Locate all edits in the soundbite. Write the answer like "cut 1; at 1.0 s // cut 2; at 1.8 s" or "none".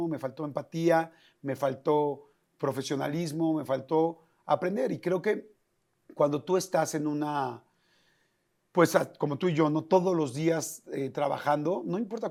none

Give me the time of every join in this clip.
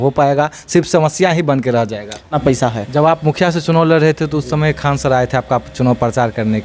cut 1; at 2.3 s

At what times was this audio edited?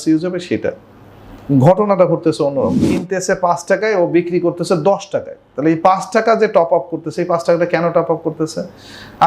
cut 1; at 2.9 s

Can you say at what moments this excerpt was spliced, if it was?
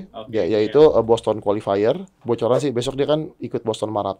cut 1; at 2.1 s

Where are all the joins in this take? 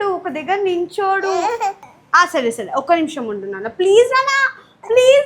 cut 1; at 1.9 s

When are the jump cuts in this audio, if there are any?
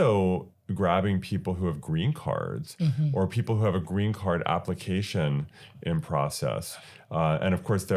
none

